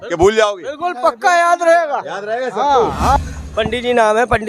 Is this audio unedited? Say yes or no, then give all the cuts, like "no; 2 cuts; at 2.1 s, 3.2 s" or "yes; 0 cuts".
no; 1 cut; at 3.2 s